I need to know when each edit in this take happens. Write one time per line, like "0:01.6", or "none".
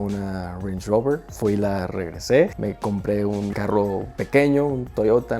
0:03.2